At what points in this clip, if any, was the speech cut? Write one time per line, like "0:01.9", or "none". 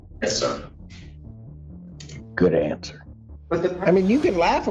0:03.4